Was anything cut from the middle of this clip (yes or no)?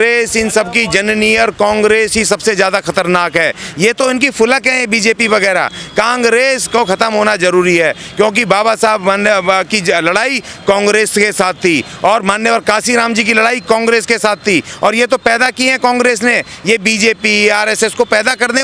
no